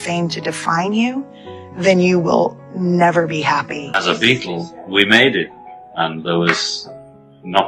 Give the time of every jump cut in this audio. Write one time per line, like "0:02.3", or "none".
0:03.9